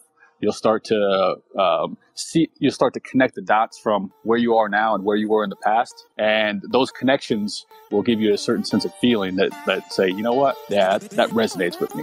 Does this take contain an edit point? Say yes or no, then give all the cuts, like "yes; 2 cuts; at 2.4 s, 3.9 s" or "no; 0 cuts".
no; 0 cuts